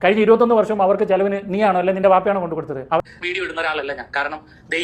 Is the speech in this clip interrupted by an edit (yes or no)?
yes